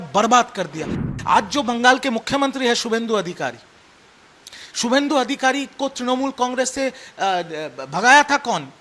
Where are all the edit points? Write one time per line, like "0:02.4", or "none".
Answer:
0:00.9